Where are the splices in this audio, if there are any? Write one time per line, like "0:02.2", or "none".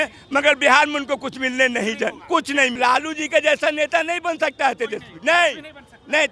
0:02.8